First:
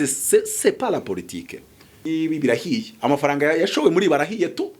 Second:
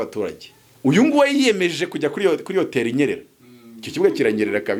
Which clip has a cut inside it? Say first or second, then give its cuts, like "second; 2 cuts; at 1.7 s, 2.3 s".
first; 1 cut; at 2.0 s